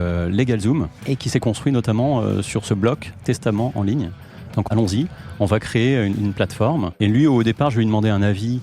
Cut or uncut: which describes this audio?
cut